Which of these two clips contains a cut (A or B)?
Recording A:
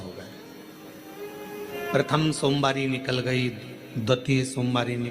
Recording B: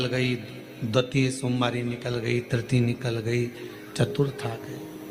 A